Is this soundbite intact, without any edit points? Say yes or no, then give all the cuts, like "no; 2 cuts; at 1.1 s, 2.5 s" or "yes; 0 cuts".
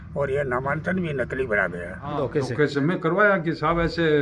no; 1 cut; at 2.1 s